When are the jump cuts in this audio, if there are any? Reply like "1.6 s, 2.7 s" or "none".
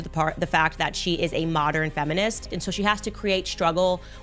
none